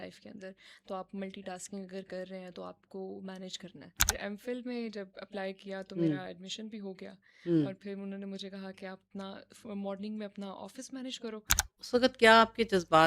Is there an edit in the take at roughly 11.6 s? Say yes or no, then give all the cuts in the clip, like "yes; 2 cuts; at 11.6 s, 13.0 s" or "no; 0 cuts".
yes; 2 cuts; at 4.1 s, 11.6 s